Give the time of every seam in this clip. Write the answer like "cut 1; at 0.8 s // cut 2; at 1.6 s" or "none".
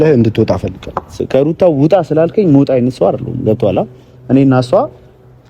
cut 1; at 1.2 s